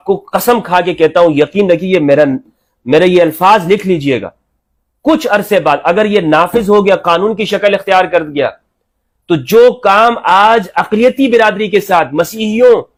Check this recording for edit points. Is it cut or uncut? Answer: uncut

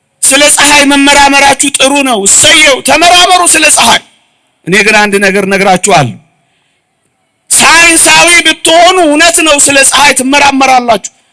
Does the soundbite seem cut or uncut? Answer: uncut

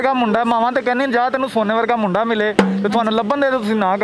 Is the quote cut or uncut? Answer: uncut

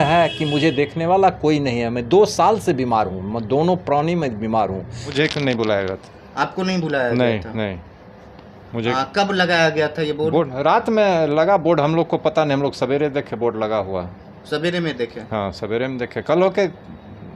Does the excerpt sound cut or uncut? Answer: cut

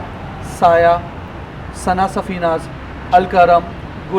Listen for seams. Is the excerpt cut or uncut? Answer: uncut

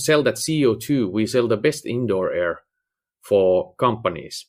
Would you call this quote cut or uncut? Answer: uncut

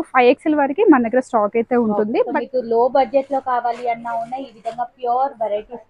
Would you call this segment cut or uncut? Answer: cut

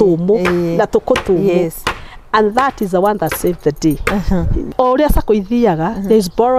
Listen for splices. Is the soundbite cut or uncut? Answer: cut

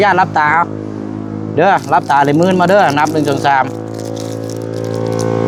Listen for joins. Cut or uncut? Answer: uncut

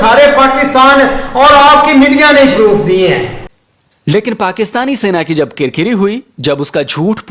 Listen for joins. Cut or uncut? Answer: cut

